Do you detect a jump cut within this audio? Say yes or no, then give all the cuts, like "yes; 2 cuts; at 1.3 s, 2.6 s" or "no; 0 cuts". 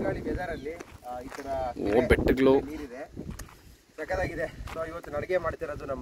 no; 0 cuts